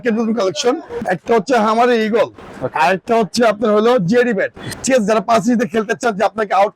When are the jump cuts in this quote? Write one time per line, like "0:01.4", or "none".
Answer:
0:01.0
0:04.6